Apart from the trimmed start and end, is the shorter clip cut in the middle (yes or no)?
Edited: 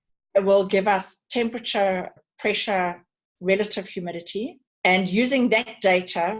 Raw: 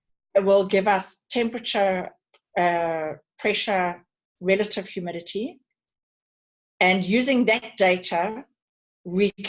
yes